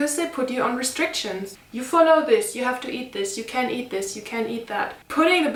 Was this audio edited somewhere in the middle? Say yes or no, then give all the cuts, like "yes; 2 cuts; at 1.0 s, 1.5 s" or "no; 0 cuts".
no; 0 cuts